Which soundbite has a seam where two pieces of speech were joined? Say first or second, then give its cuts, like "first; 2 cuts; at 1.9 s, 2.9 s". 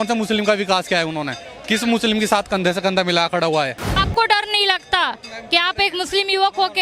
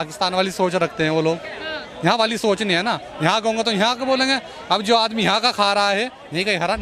first; 1 cut; at 3.8 s